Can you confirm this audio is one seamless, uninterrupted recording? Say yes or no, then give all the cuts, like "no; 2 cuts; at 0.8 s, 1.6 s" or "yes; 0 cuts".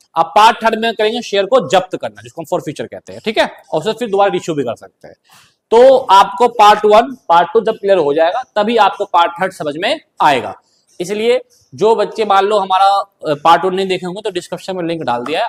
yes; 0 cuts